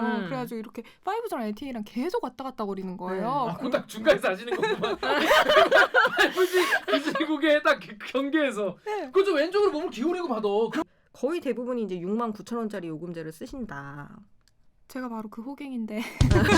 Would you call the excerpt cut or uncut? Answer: cut